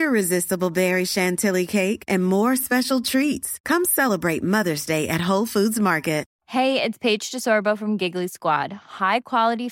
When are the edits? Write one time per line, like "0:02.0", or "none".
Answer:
0:06.3